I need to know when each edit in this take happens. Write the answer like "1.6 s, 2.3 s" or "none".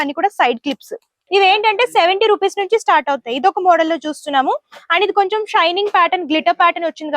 1.1 s